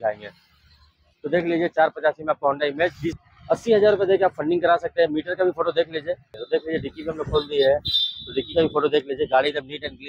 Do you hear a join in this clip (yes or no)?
yes